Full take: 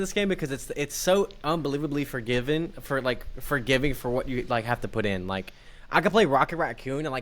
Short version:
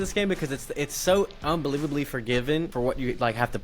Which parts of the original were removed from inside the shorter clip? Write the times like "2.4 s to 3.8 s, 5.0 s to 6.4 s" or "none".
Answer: 2.7 s to 4.0 s